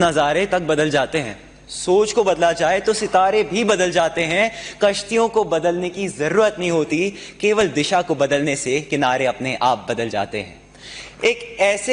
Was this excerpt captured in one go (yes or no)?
yes